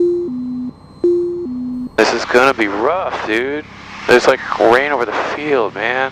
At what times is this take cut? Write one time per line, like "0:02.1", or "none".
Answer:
0:01.9